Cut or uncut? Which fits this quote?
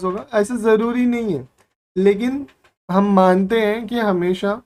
uncut